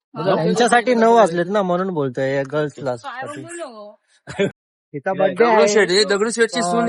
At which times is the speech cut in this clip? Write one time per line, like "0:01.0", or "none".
0:04.5